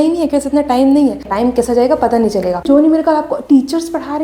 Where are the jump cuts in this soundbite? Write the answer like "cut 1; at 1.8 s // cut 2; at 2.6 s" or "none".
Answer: cut 1; at 1.3 s // cut 2; at 2.6 s